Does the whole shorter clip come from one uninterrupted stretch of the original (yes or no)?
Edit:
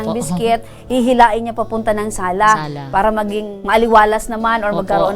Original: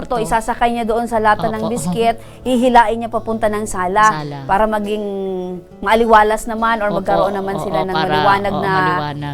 no